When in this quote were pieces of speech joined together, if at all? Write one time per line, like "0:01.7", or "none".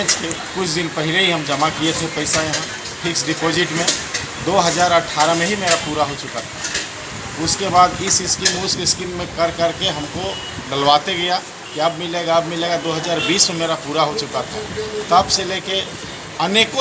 none